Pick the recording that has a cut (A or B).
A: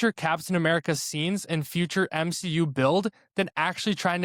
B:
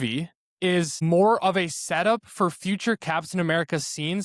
B